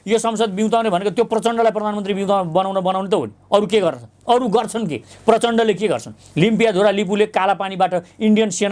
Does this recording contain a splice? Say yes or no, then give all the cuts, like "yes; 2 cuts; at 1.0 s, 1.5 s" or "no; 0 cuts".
no; 0 cuts